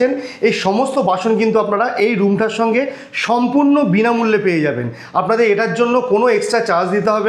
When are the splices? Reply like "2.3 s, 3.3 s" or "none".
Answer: none